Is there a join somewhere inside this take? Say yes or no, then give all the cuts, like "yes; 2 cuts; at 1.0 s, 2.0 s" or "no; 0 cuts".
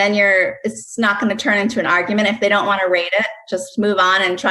no; 0 cuts